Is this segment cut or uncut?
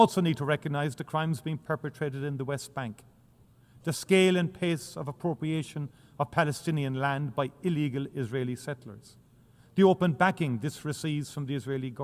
uncut